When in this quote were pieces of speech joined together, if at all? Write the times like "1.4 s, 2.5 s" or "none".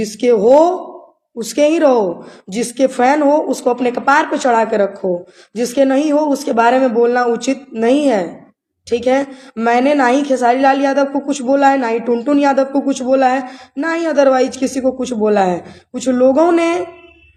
none